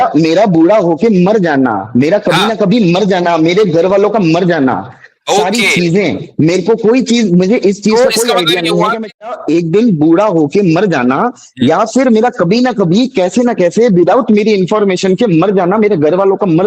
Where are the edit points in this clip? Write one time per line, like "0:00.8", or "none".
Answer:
0:09.3